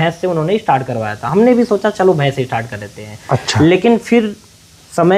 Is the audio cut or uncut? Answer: uncut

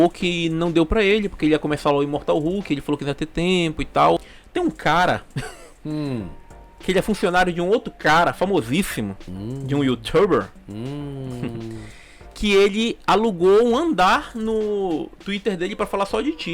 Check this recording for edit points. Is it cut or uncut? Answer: cut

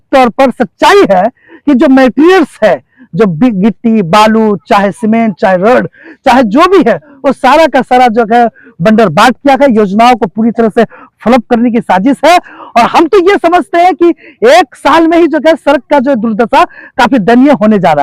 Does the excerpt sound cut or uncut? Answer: uncut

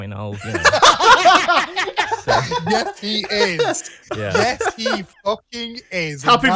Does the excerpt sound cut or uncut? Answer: uncut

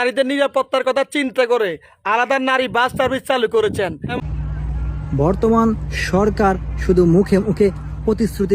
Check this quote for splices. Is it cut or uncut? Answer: cut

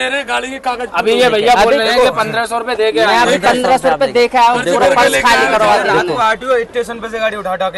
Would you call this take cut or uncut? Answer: uncut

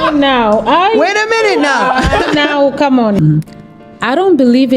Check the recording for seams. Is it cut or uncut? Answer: cut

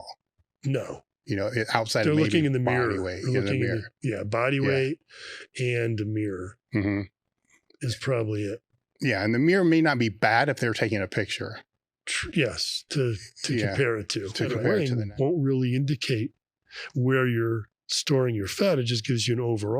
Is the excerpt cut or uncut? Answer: cut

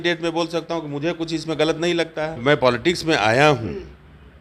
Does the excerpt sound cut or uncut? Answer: cut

